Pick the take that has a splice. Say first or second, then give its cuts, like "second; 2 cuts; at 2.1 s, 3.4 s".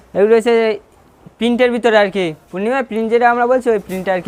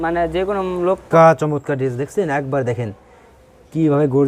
second; 1 cut; at 1.0 s